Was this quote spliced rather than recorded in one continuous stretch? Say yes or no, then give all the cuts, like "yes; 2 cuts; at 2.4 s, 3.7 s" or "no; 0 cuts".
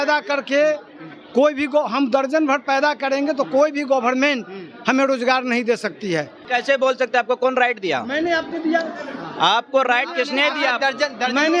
yes; 1 cut; at 6.4 s